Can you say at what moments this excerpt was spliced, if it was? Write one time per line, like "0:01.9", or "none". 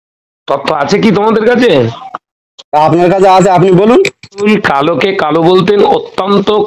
0:04.4

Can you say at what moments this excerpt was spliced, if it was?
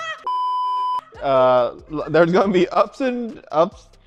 none

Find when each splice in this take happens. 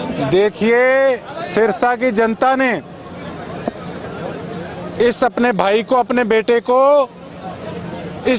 none

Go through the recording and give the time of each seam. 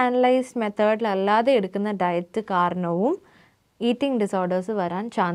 none

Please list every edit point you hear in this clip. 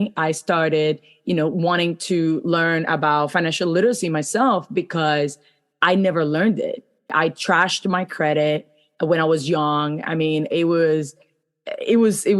0:07.1

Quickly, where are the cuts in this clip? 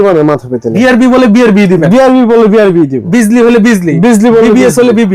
0:00.7
0:03.0

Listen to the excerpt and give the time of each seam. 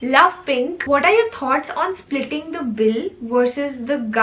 0:00.9

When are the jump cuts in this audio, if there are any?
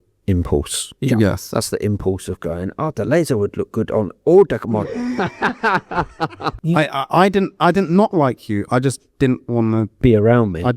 0:06.6

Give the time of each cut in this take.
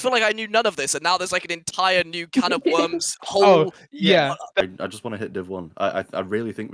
0:04.6

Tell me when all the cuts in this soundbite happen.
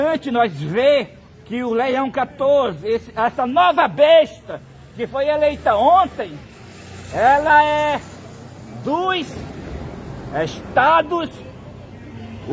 none

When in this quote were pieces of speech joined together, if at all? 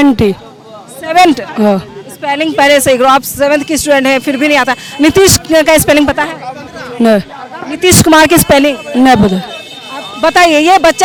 none

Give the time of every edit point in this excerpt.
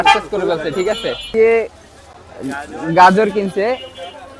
0:01.3

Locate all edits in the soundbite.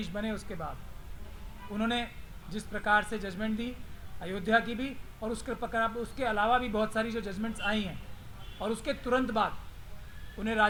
none

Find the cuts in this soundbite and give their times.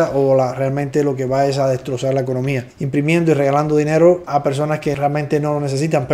none

